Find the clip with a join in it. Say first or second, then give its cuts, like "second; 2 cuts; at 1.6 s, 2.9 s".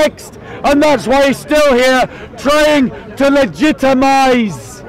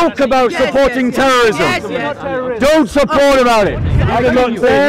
second; 1 cut; at 3.9 s